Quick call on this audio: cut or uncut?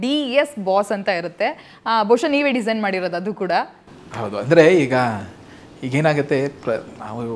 uncut